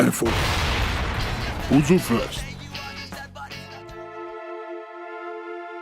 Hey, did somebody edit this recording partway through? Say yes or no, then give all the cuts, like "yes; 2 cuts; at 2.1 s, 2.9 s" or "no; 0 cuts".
yes; 1 cut; at 3.7 s